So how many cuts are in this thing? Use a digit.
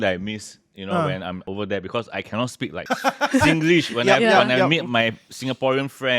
2